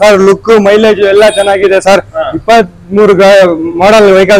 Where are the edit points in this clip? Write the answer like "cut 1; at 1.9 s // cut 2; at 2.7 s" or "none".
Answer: none